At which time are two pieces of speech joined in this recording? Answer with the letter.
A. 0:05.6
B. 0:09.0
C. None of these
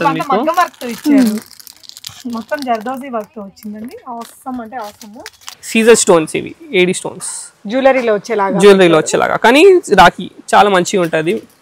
A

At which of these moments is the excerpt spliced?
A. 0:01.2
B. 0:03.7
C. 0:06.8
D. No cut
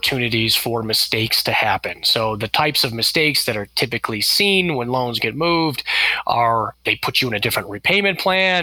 C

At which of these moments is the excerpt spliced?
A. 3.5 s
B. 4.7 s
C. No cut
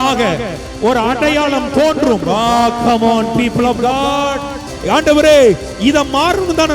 B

